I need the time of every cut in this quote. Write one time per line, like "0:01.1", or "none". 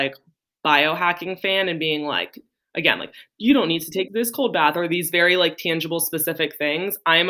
0:04.1